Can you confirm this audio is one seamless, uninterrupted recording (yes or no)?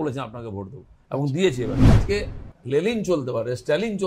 no